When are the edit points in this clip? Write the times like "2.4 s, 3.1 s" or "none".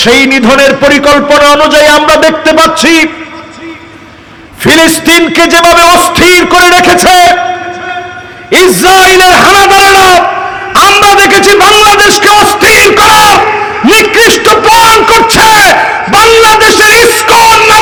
none